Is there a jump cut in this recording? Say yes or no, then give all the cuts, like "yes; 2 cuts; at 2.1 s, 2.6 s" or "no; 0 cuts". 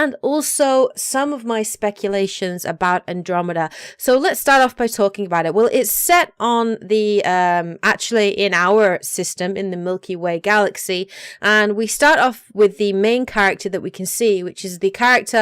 yes; 1 cut; at 13.6 s